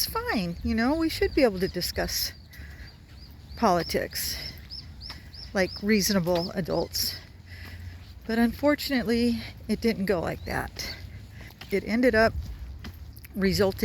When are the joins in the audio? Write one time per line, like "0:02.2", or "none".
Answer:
0:11.5